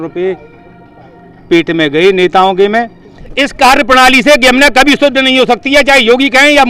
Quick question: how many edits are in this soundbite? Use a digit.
1